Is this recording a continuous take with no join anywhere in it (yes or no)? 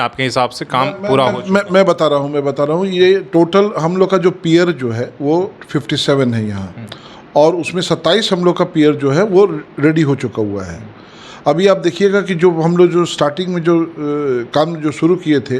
yes